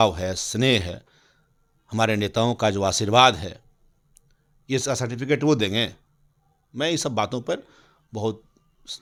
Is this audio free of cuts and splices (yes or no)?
yes